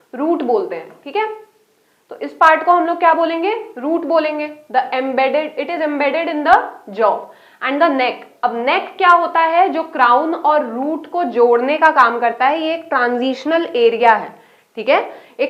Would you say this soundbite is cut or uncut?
uncut